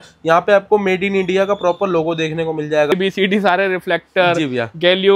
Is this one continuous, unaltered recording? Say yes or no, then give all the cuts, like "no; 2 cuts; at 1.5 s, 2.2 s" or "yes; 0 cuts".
no; 1 cut; at 2.9 s